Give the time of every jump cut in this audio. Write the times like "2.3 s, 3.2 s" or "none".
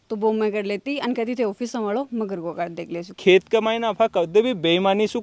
3.1 s